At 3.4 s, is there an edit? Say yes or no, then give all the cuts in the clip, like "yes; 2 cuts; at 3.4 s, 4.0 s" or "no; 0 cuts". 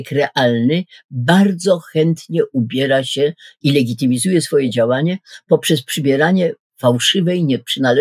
no; 0 cuts